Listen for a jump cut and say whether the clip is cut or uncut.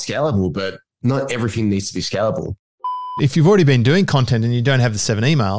cut